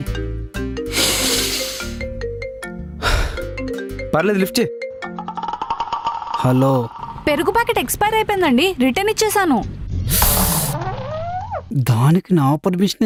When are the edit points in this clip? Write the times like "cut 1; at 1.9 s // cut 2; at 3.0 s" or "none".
none